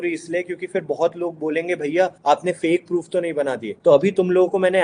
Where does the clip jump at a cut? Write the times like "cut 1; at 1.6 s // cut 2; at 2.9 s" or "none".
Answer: cut 1; at 2.2 s // cut 2; at 3.7 s